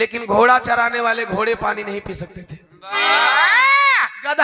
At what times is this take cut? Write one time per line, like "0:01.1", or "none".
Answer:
none